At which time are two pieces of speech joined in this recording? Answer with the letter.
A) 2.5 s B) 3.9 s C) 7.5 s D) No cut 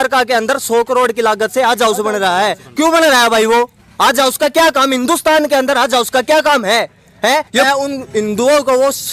C